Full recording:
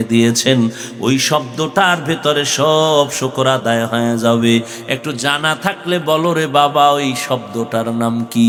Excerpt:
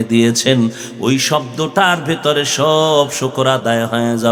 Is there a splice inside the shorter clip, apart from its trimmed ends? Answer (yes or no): no